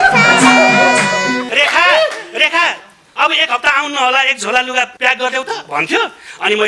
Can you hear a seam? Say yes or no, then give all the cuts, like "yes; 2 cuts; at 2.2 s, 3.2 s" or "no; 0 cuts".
yes; 2 cuts; at 1.4 s, 4.9 s